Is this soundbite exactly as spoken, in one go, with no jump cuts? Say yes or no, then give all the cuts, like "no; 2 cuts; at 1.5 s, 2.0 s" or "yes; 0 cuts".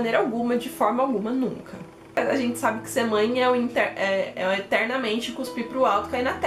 yes; 0 cuts